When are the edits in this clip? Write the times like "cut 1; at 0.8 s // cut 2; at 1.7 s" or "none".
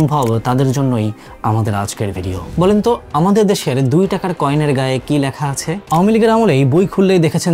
cut 1; at 2.4 s // cut 2; at 5.8 s